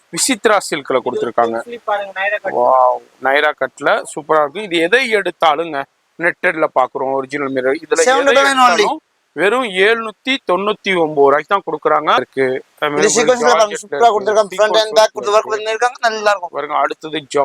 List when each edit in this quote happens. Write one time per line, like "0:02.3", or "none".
0:12.2